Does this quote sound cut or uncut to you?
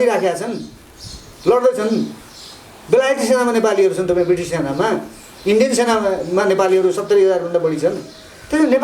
uncut